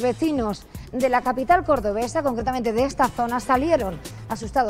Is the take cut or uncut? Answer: uncut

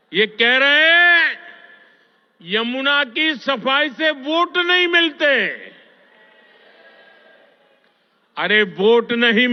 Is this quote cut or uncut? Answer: uncut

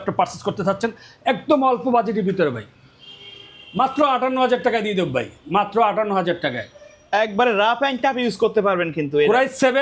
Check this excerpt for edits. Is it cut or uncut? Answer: uncut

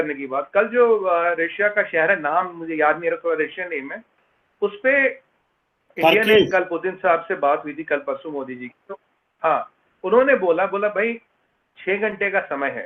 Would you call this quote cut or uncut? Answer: uncut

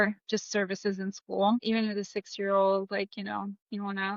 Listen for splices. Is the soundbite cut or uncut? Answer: cut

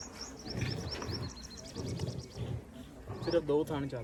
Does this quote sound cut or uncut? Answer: uncut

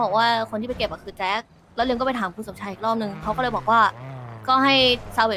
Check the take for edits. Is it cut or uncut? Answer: uncut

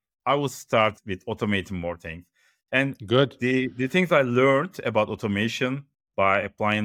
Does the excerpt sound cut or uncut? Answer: uncut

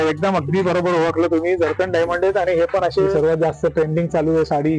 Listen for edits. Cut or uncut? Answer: cut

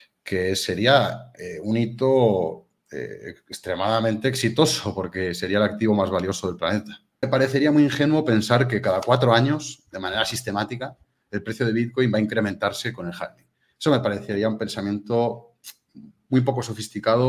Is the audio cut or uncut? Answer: cut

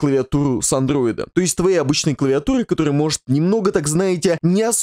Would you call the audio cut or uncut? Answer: cut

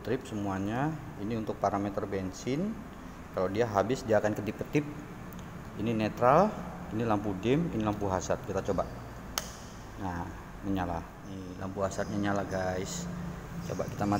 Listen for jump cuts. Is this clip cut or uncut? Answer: cut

